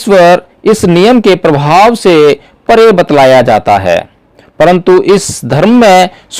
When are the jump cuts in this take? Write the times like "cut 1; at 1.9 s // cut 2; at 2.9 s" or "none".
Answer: none